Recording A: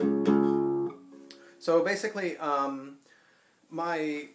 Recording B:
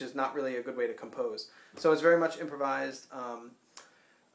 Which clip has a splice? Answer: A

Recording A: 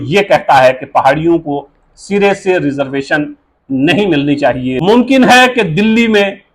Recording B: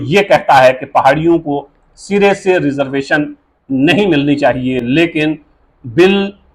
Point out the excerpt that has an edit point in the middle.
A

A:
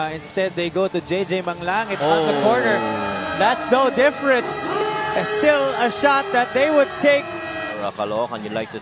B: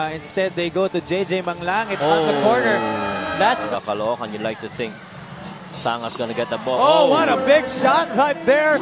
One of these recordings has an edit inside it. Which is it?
B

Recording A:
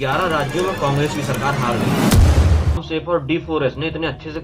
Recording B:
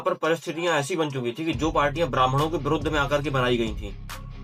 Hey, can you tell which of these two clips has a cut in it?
A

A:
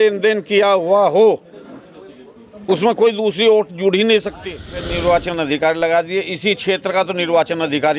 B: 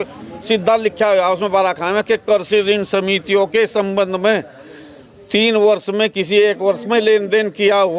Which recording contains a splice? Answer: A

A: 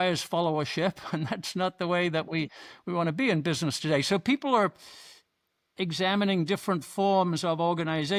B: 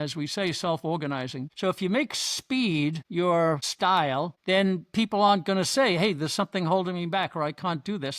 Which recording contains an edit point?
B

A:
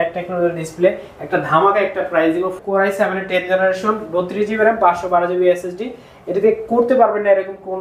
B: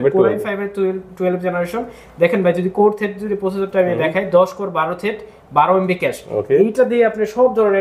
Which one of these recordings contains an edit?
A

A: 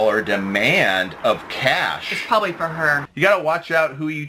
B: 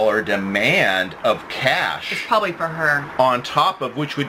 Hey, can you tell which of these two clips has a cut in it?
A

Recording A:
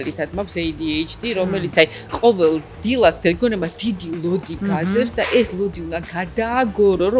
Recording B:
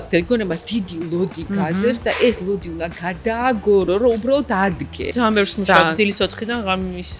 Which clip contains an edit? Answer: B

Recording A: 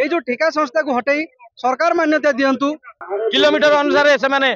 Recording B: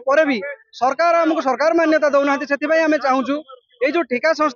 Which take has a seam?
A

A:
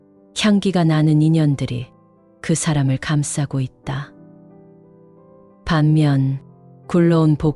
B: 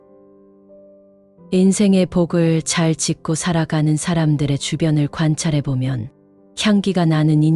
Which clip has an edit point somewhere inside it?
A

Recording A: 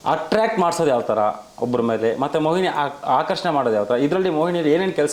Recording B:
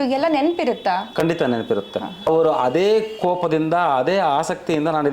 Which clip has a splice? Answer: B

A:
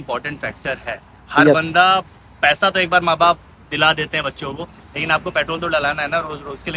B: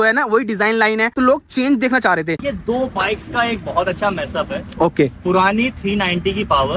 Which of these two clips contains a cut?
B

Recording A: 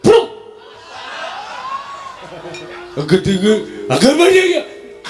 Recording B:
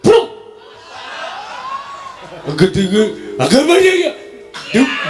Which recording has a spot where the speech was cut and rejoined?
B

